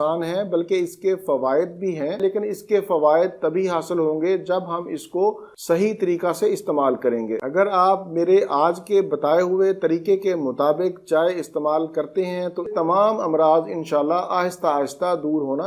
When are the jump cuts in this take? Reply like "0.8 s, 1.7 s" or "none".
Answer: 2.2 s, 7.4 s, 12.7 s

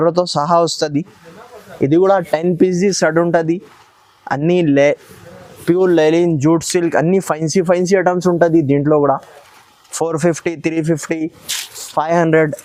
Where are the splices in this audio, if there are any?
none

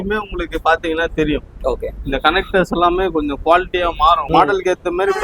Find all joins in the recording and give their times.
4.2 s

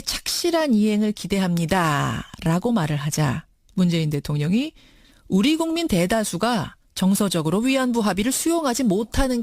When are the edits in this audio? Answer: 4.4 s

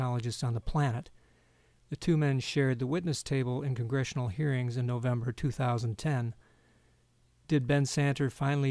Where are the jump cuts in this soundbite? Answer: 7.2 s

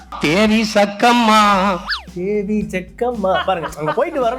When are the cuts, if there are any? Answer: 1.5 s

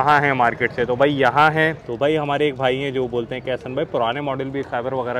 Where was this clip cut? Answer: 1.8 s

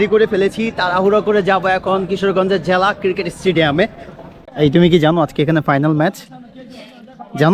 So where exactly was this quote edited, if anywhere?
4.3 s

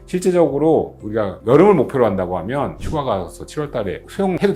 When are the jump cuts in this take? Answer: 2.8 s

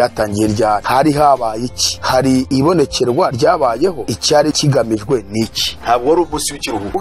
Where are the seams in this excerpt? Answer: 0.8 s, 2.3 s, 4.1 s, 5.7 s

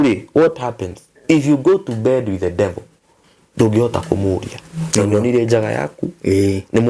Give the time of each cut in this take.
none

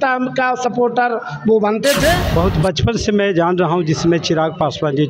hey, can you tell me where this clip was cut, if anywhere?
2.2 s

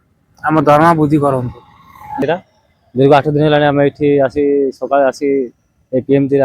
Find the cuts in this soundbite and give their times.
2.2 s

